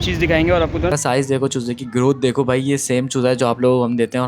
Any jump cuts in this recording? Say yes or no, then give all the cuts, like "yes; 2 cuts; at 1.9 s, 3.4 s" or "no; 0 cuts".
yes; 1 cut; at 0.9 s